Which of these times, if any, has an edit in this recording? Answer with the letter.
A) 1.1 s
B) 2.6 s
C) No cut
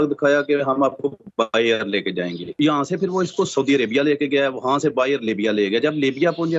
B